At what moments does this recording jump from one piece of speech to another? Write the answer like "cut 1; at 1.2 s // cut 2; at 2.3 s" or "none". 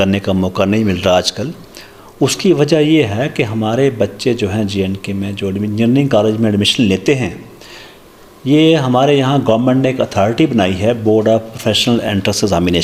none

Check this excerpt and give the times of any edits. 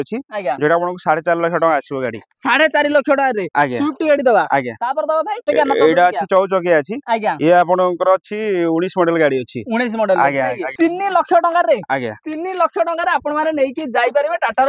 cut 1; at 5.4 s // cut 2; at 10.6 s

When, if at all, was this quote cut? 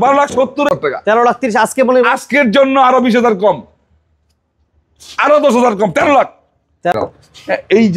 cut 1; at 0.7 s // cut 2; at 6.9 s

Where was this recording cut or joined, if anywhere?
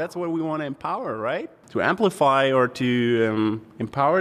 cut 1; at 1.6 s

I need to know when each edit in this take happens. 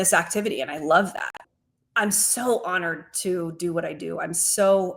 cut 1; at 1.5 s

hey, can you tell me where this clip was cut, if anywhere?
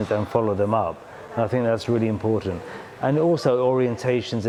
none

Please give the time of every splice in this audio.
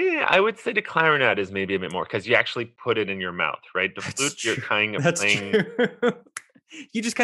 none

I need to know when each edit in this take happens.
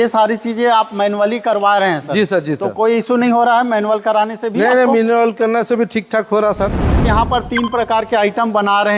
cut 1; at 7.0 s

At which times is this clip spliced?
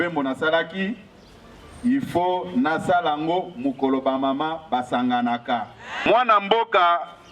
cut 1; at 6.1 s

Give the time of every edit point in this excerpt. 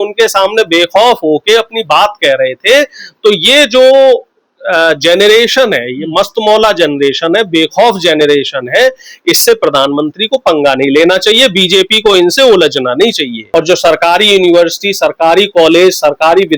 cut 1; at 13.4 s

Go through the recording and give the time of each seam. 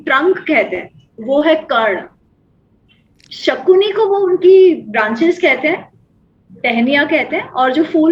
none

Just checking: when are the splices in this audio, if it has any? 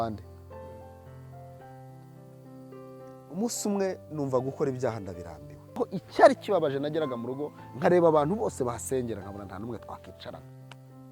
cut 1; at 5.8 s

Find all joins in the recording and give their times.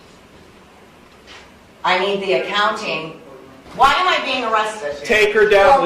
cut 1; at 3.6 s

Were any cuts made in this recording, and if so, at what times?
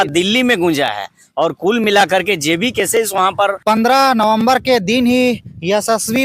cut 1; at 3.6 s

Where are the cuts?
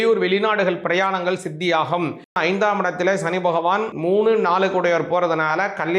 cut 1; at 2.3 s // cut 2; at 3.9 s

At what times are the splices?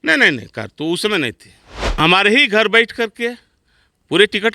cut 1; at 1.9 s

